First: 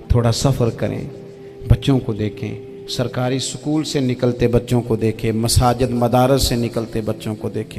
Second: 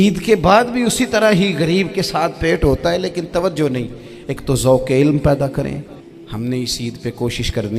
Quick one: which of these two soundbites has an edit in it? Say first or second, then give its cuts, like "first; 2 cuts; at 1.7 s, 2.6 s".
second; 1 cut; at 6.2 s